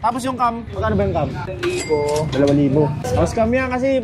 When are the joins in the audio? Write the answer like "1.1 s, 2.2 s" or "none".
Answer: 1.5 s, 3.1 s